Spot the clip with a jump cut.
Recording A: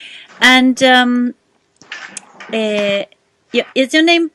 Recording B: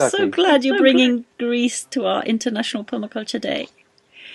A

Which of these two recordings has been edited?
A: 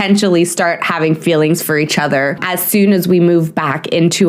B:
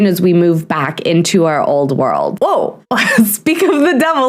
B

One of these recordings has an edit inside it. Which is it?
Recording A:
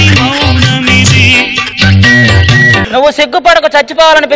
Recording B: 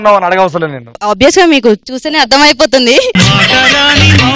A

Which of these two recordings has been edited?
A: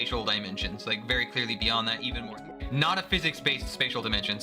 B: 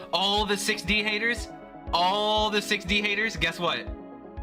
A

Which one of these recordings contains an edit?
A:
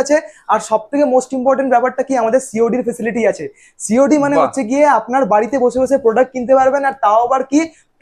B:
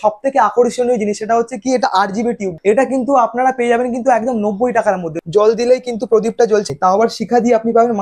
B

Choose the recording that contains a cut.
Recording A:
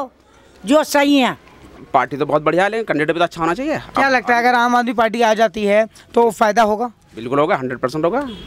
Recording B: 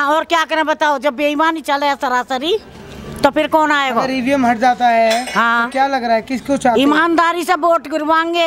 A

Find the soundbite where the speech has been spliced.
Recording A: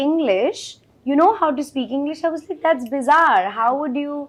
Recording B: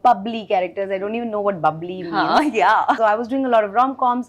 B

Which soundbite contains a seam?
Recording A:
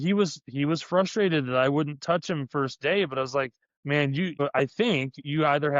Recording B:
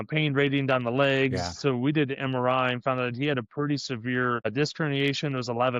A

